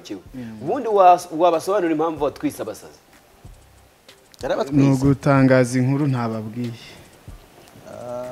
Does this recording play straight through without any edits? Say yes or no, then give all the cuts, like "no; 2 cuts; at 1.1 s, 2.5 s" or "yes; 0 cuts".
yes; 0 cuts